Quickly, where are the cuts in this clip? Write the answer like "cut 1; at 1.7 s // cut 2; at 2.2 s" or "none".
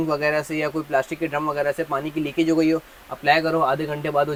none